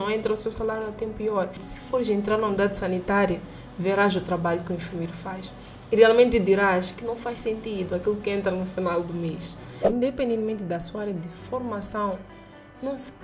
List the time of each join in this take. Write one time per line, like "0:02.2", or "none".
0:01.7
0:09.8